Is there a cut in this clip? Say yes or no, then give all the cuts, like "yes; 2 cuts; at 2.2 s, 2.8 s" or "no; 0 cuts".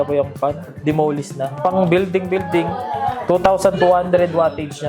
yes; 2 cuts; at 1.5 s, 3.2 s